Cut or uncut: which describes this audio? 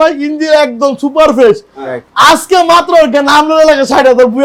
uncut